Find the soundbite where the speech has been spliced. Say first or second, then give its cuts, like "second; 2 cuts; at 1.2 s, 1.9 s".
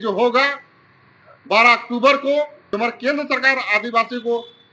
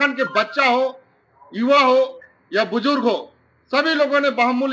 first; 1 cut; at 2.6 s